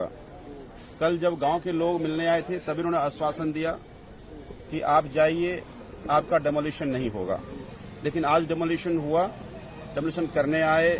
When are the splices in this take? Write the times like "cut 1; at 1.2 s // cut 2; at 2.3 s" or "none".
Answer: none